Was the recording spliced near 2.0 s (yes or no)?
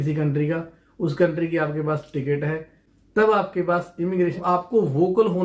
no